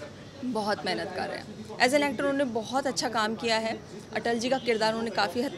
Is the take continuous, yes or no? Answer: yes